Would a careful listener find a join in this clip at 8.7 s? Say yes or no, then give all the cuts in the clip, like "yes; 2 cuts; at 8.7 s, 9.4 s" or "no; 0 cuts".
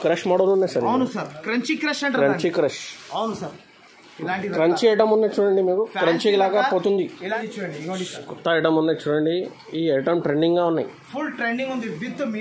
no; 1 cut; at 7.4 s